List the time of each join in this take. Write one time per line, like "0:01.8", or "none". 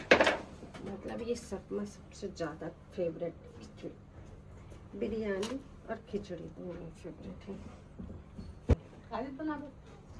0:08.7